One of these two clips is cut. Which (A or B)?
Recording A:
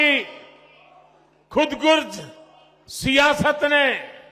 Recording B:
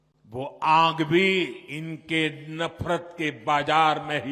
B